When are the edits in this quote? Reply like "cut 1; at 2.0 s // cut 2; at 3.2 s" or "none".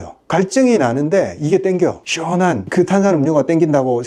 none